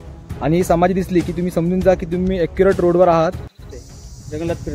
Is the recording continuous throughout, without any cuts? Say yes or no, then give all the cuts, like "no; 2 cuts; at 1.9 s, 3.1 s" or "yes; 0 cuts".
no; 1 cut; at 3.7 s